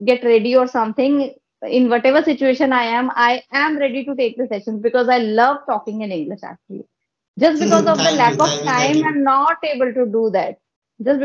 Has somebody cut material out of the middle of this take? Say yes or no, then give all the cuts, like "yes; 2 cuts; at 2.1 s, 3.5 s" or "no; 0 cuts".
no; 0 cuts